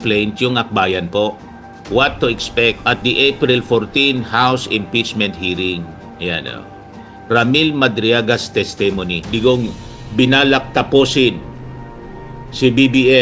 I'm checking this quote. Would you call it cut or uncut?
cut